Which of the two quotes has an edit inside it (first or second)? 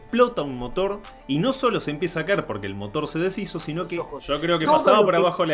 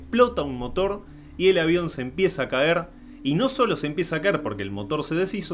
first